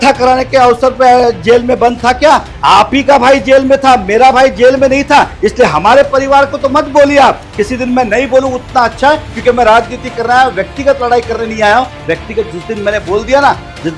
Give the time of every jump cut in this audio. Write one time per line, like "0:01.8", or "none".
none